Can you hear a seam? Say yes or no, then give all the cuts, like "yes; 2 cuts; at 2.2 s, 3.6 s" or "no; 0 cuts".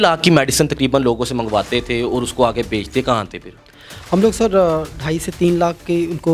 no; 0 cuts